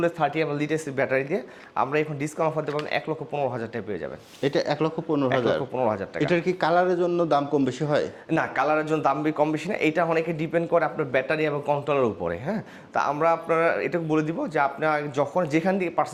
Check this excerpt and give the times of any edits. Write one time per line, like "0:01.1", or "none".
none